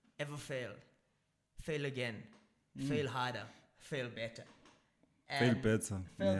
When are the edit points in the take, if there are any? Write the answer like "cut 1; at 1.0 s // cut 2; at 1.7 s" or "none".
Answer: none